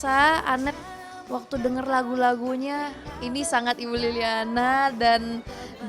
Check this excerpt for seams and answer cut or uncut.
uncut